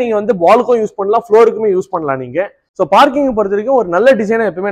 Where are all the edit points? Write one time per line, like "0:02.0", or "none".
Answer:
0:02.6